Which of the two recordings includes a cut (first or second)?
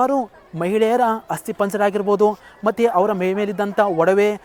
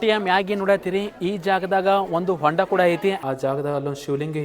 second